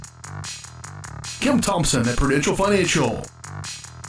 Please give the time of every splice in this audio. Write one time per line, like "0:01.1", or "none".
0:00.9